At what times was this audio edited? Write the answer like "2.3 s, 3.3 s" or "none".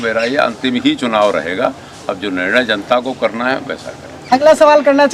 none